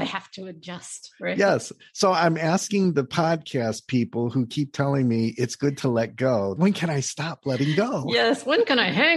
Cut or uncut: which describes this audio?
cut